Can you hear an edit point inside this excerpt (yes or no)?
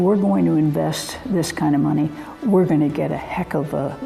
no